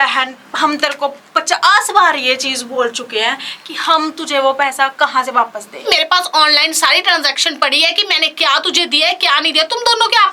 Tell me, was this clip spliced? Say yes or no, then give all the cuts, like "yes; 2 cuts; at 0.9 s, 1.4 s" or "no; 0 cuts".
yes; 1 cut; at 5.8 s